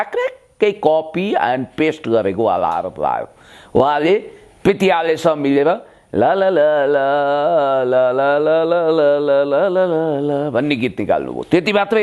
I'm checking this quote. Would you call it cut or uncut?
uncut